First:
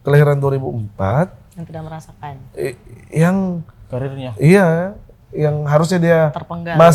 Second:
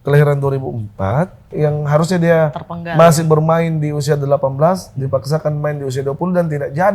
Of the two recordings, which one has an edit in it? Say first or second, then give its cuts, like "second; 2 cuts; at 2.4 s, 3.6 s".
second; 1 cut; at 1.4 s